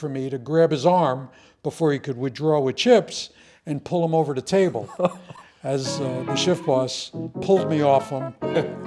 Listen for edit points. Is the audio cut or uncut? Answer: uncut